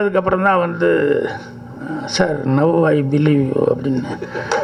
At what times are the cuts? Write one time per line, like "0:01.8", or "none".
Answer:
none